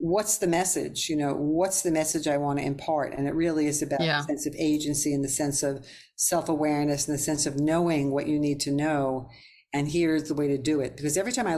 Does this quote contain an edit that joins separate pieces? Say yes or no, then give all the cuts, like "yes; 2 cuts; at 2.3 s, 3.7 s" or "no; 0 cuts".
no; 0 cuts